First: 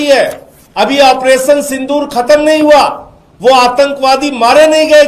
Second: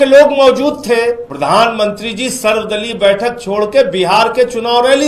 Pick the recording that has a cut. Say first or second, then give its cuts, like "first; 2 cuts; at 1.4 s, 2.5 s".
second; 1 cut; at 1.3 s